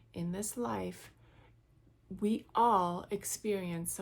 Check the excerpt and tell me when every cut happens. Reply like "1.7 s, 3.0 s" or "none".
none